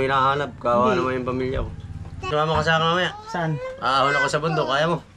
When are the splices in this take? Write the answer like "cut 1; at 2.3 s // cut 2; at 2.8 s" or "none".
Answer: cut 1; at 2.3 s